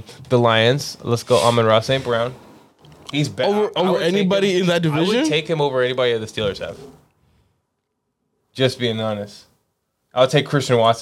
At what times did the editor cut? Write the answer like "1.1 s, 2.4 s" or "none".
none